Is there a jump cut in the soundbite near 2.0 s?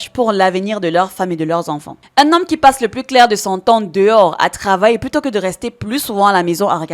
yes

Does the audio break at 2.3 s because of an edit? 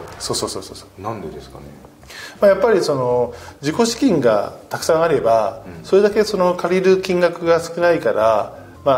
no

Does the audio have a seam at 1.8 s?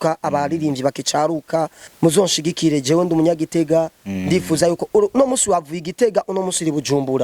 yes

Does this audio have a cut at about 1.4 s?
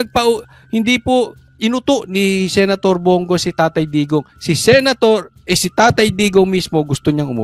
yes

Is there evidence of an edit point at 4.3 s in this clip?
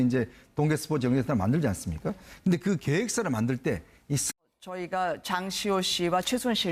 no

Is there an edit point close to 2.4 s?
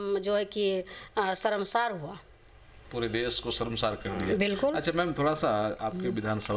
no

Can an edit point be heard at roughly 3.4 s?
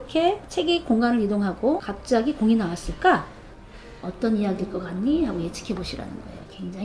no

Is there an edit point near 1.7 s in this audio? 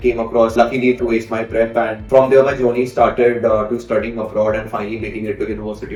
no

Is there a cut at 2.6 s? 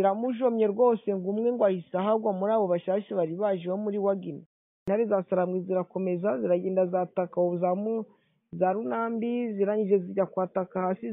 no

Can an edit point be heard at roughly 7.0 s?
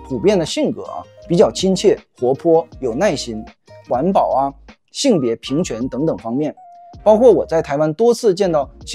no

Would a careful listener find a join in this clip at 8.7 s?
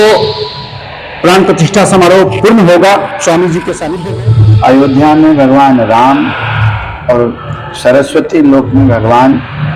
no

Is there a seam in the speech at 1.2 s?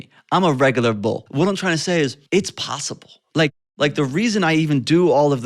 yes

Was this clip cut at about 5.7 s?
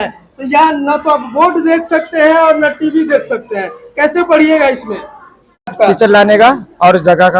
yes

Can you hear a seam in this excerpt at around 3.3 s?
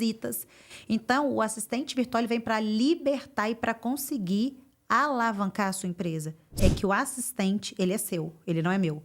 no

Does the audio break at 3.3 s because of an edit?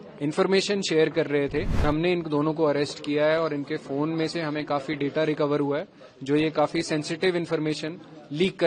no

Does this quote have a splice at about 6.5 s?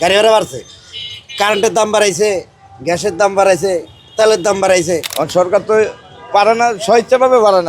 no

